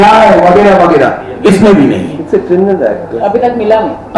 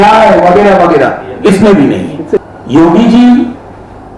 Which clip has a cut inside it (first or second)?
second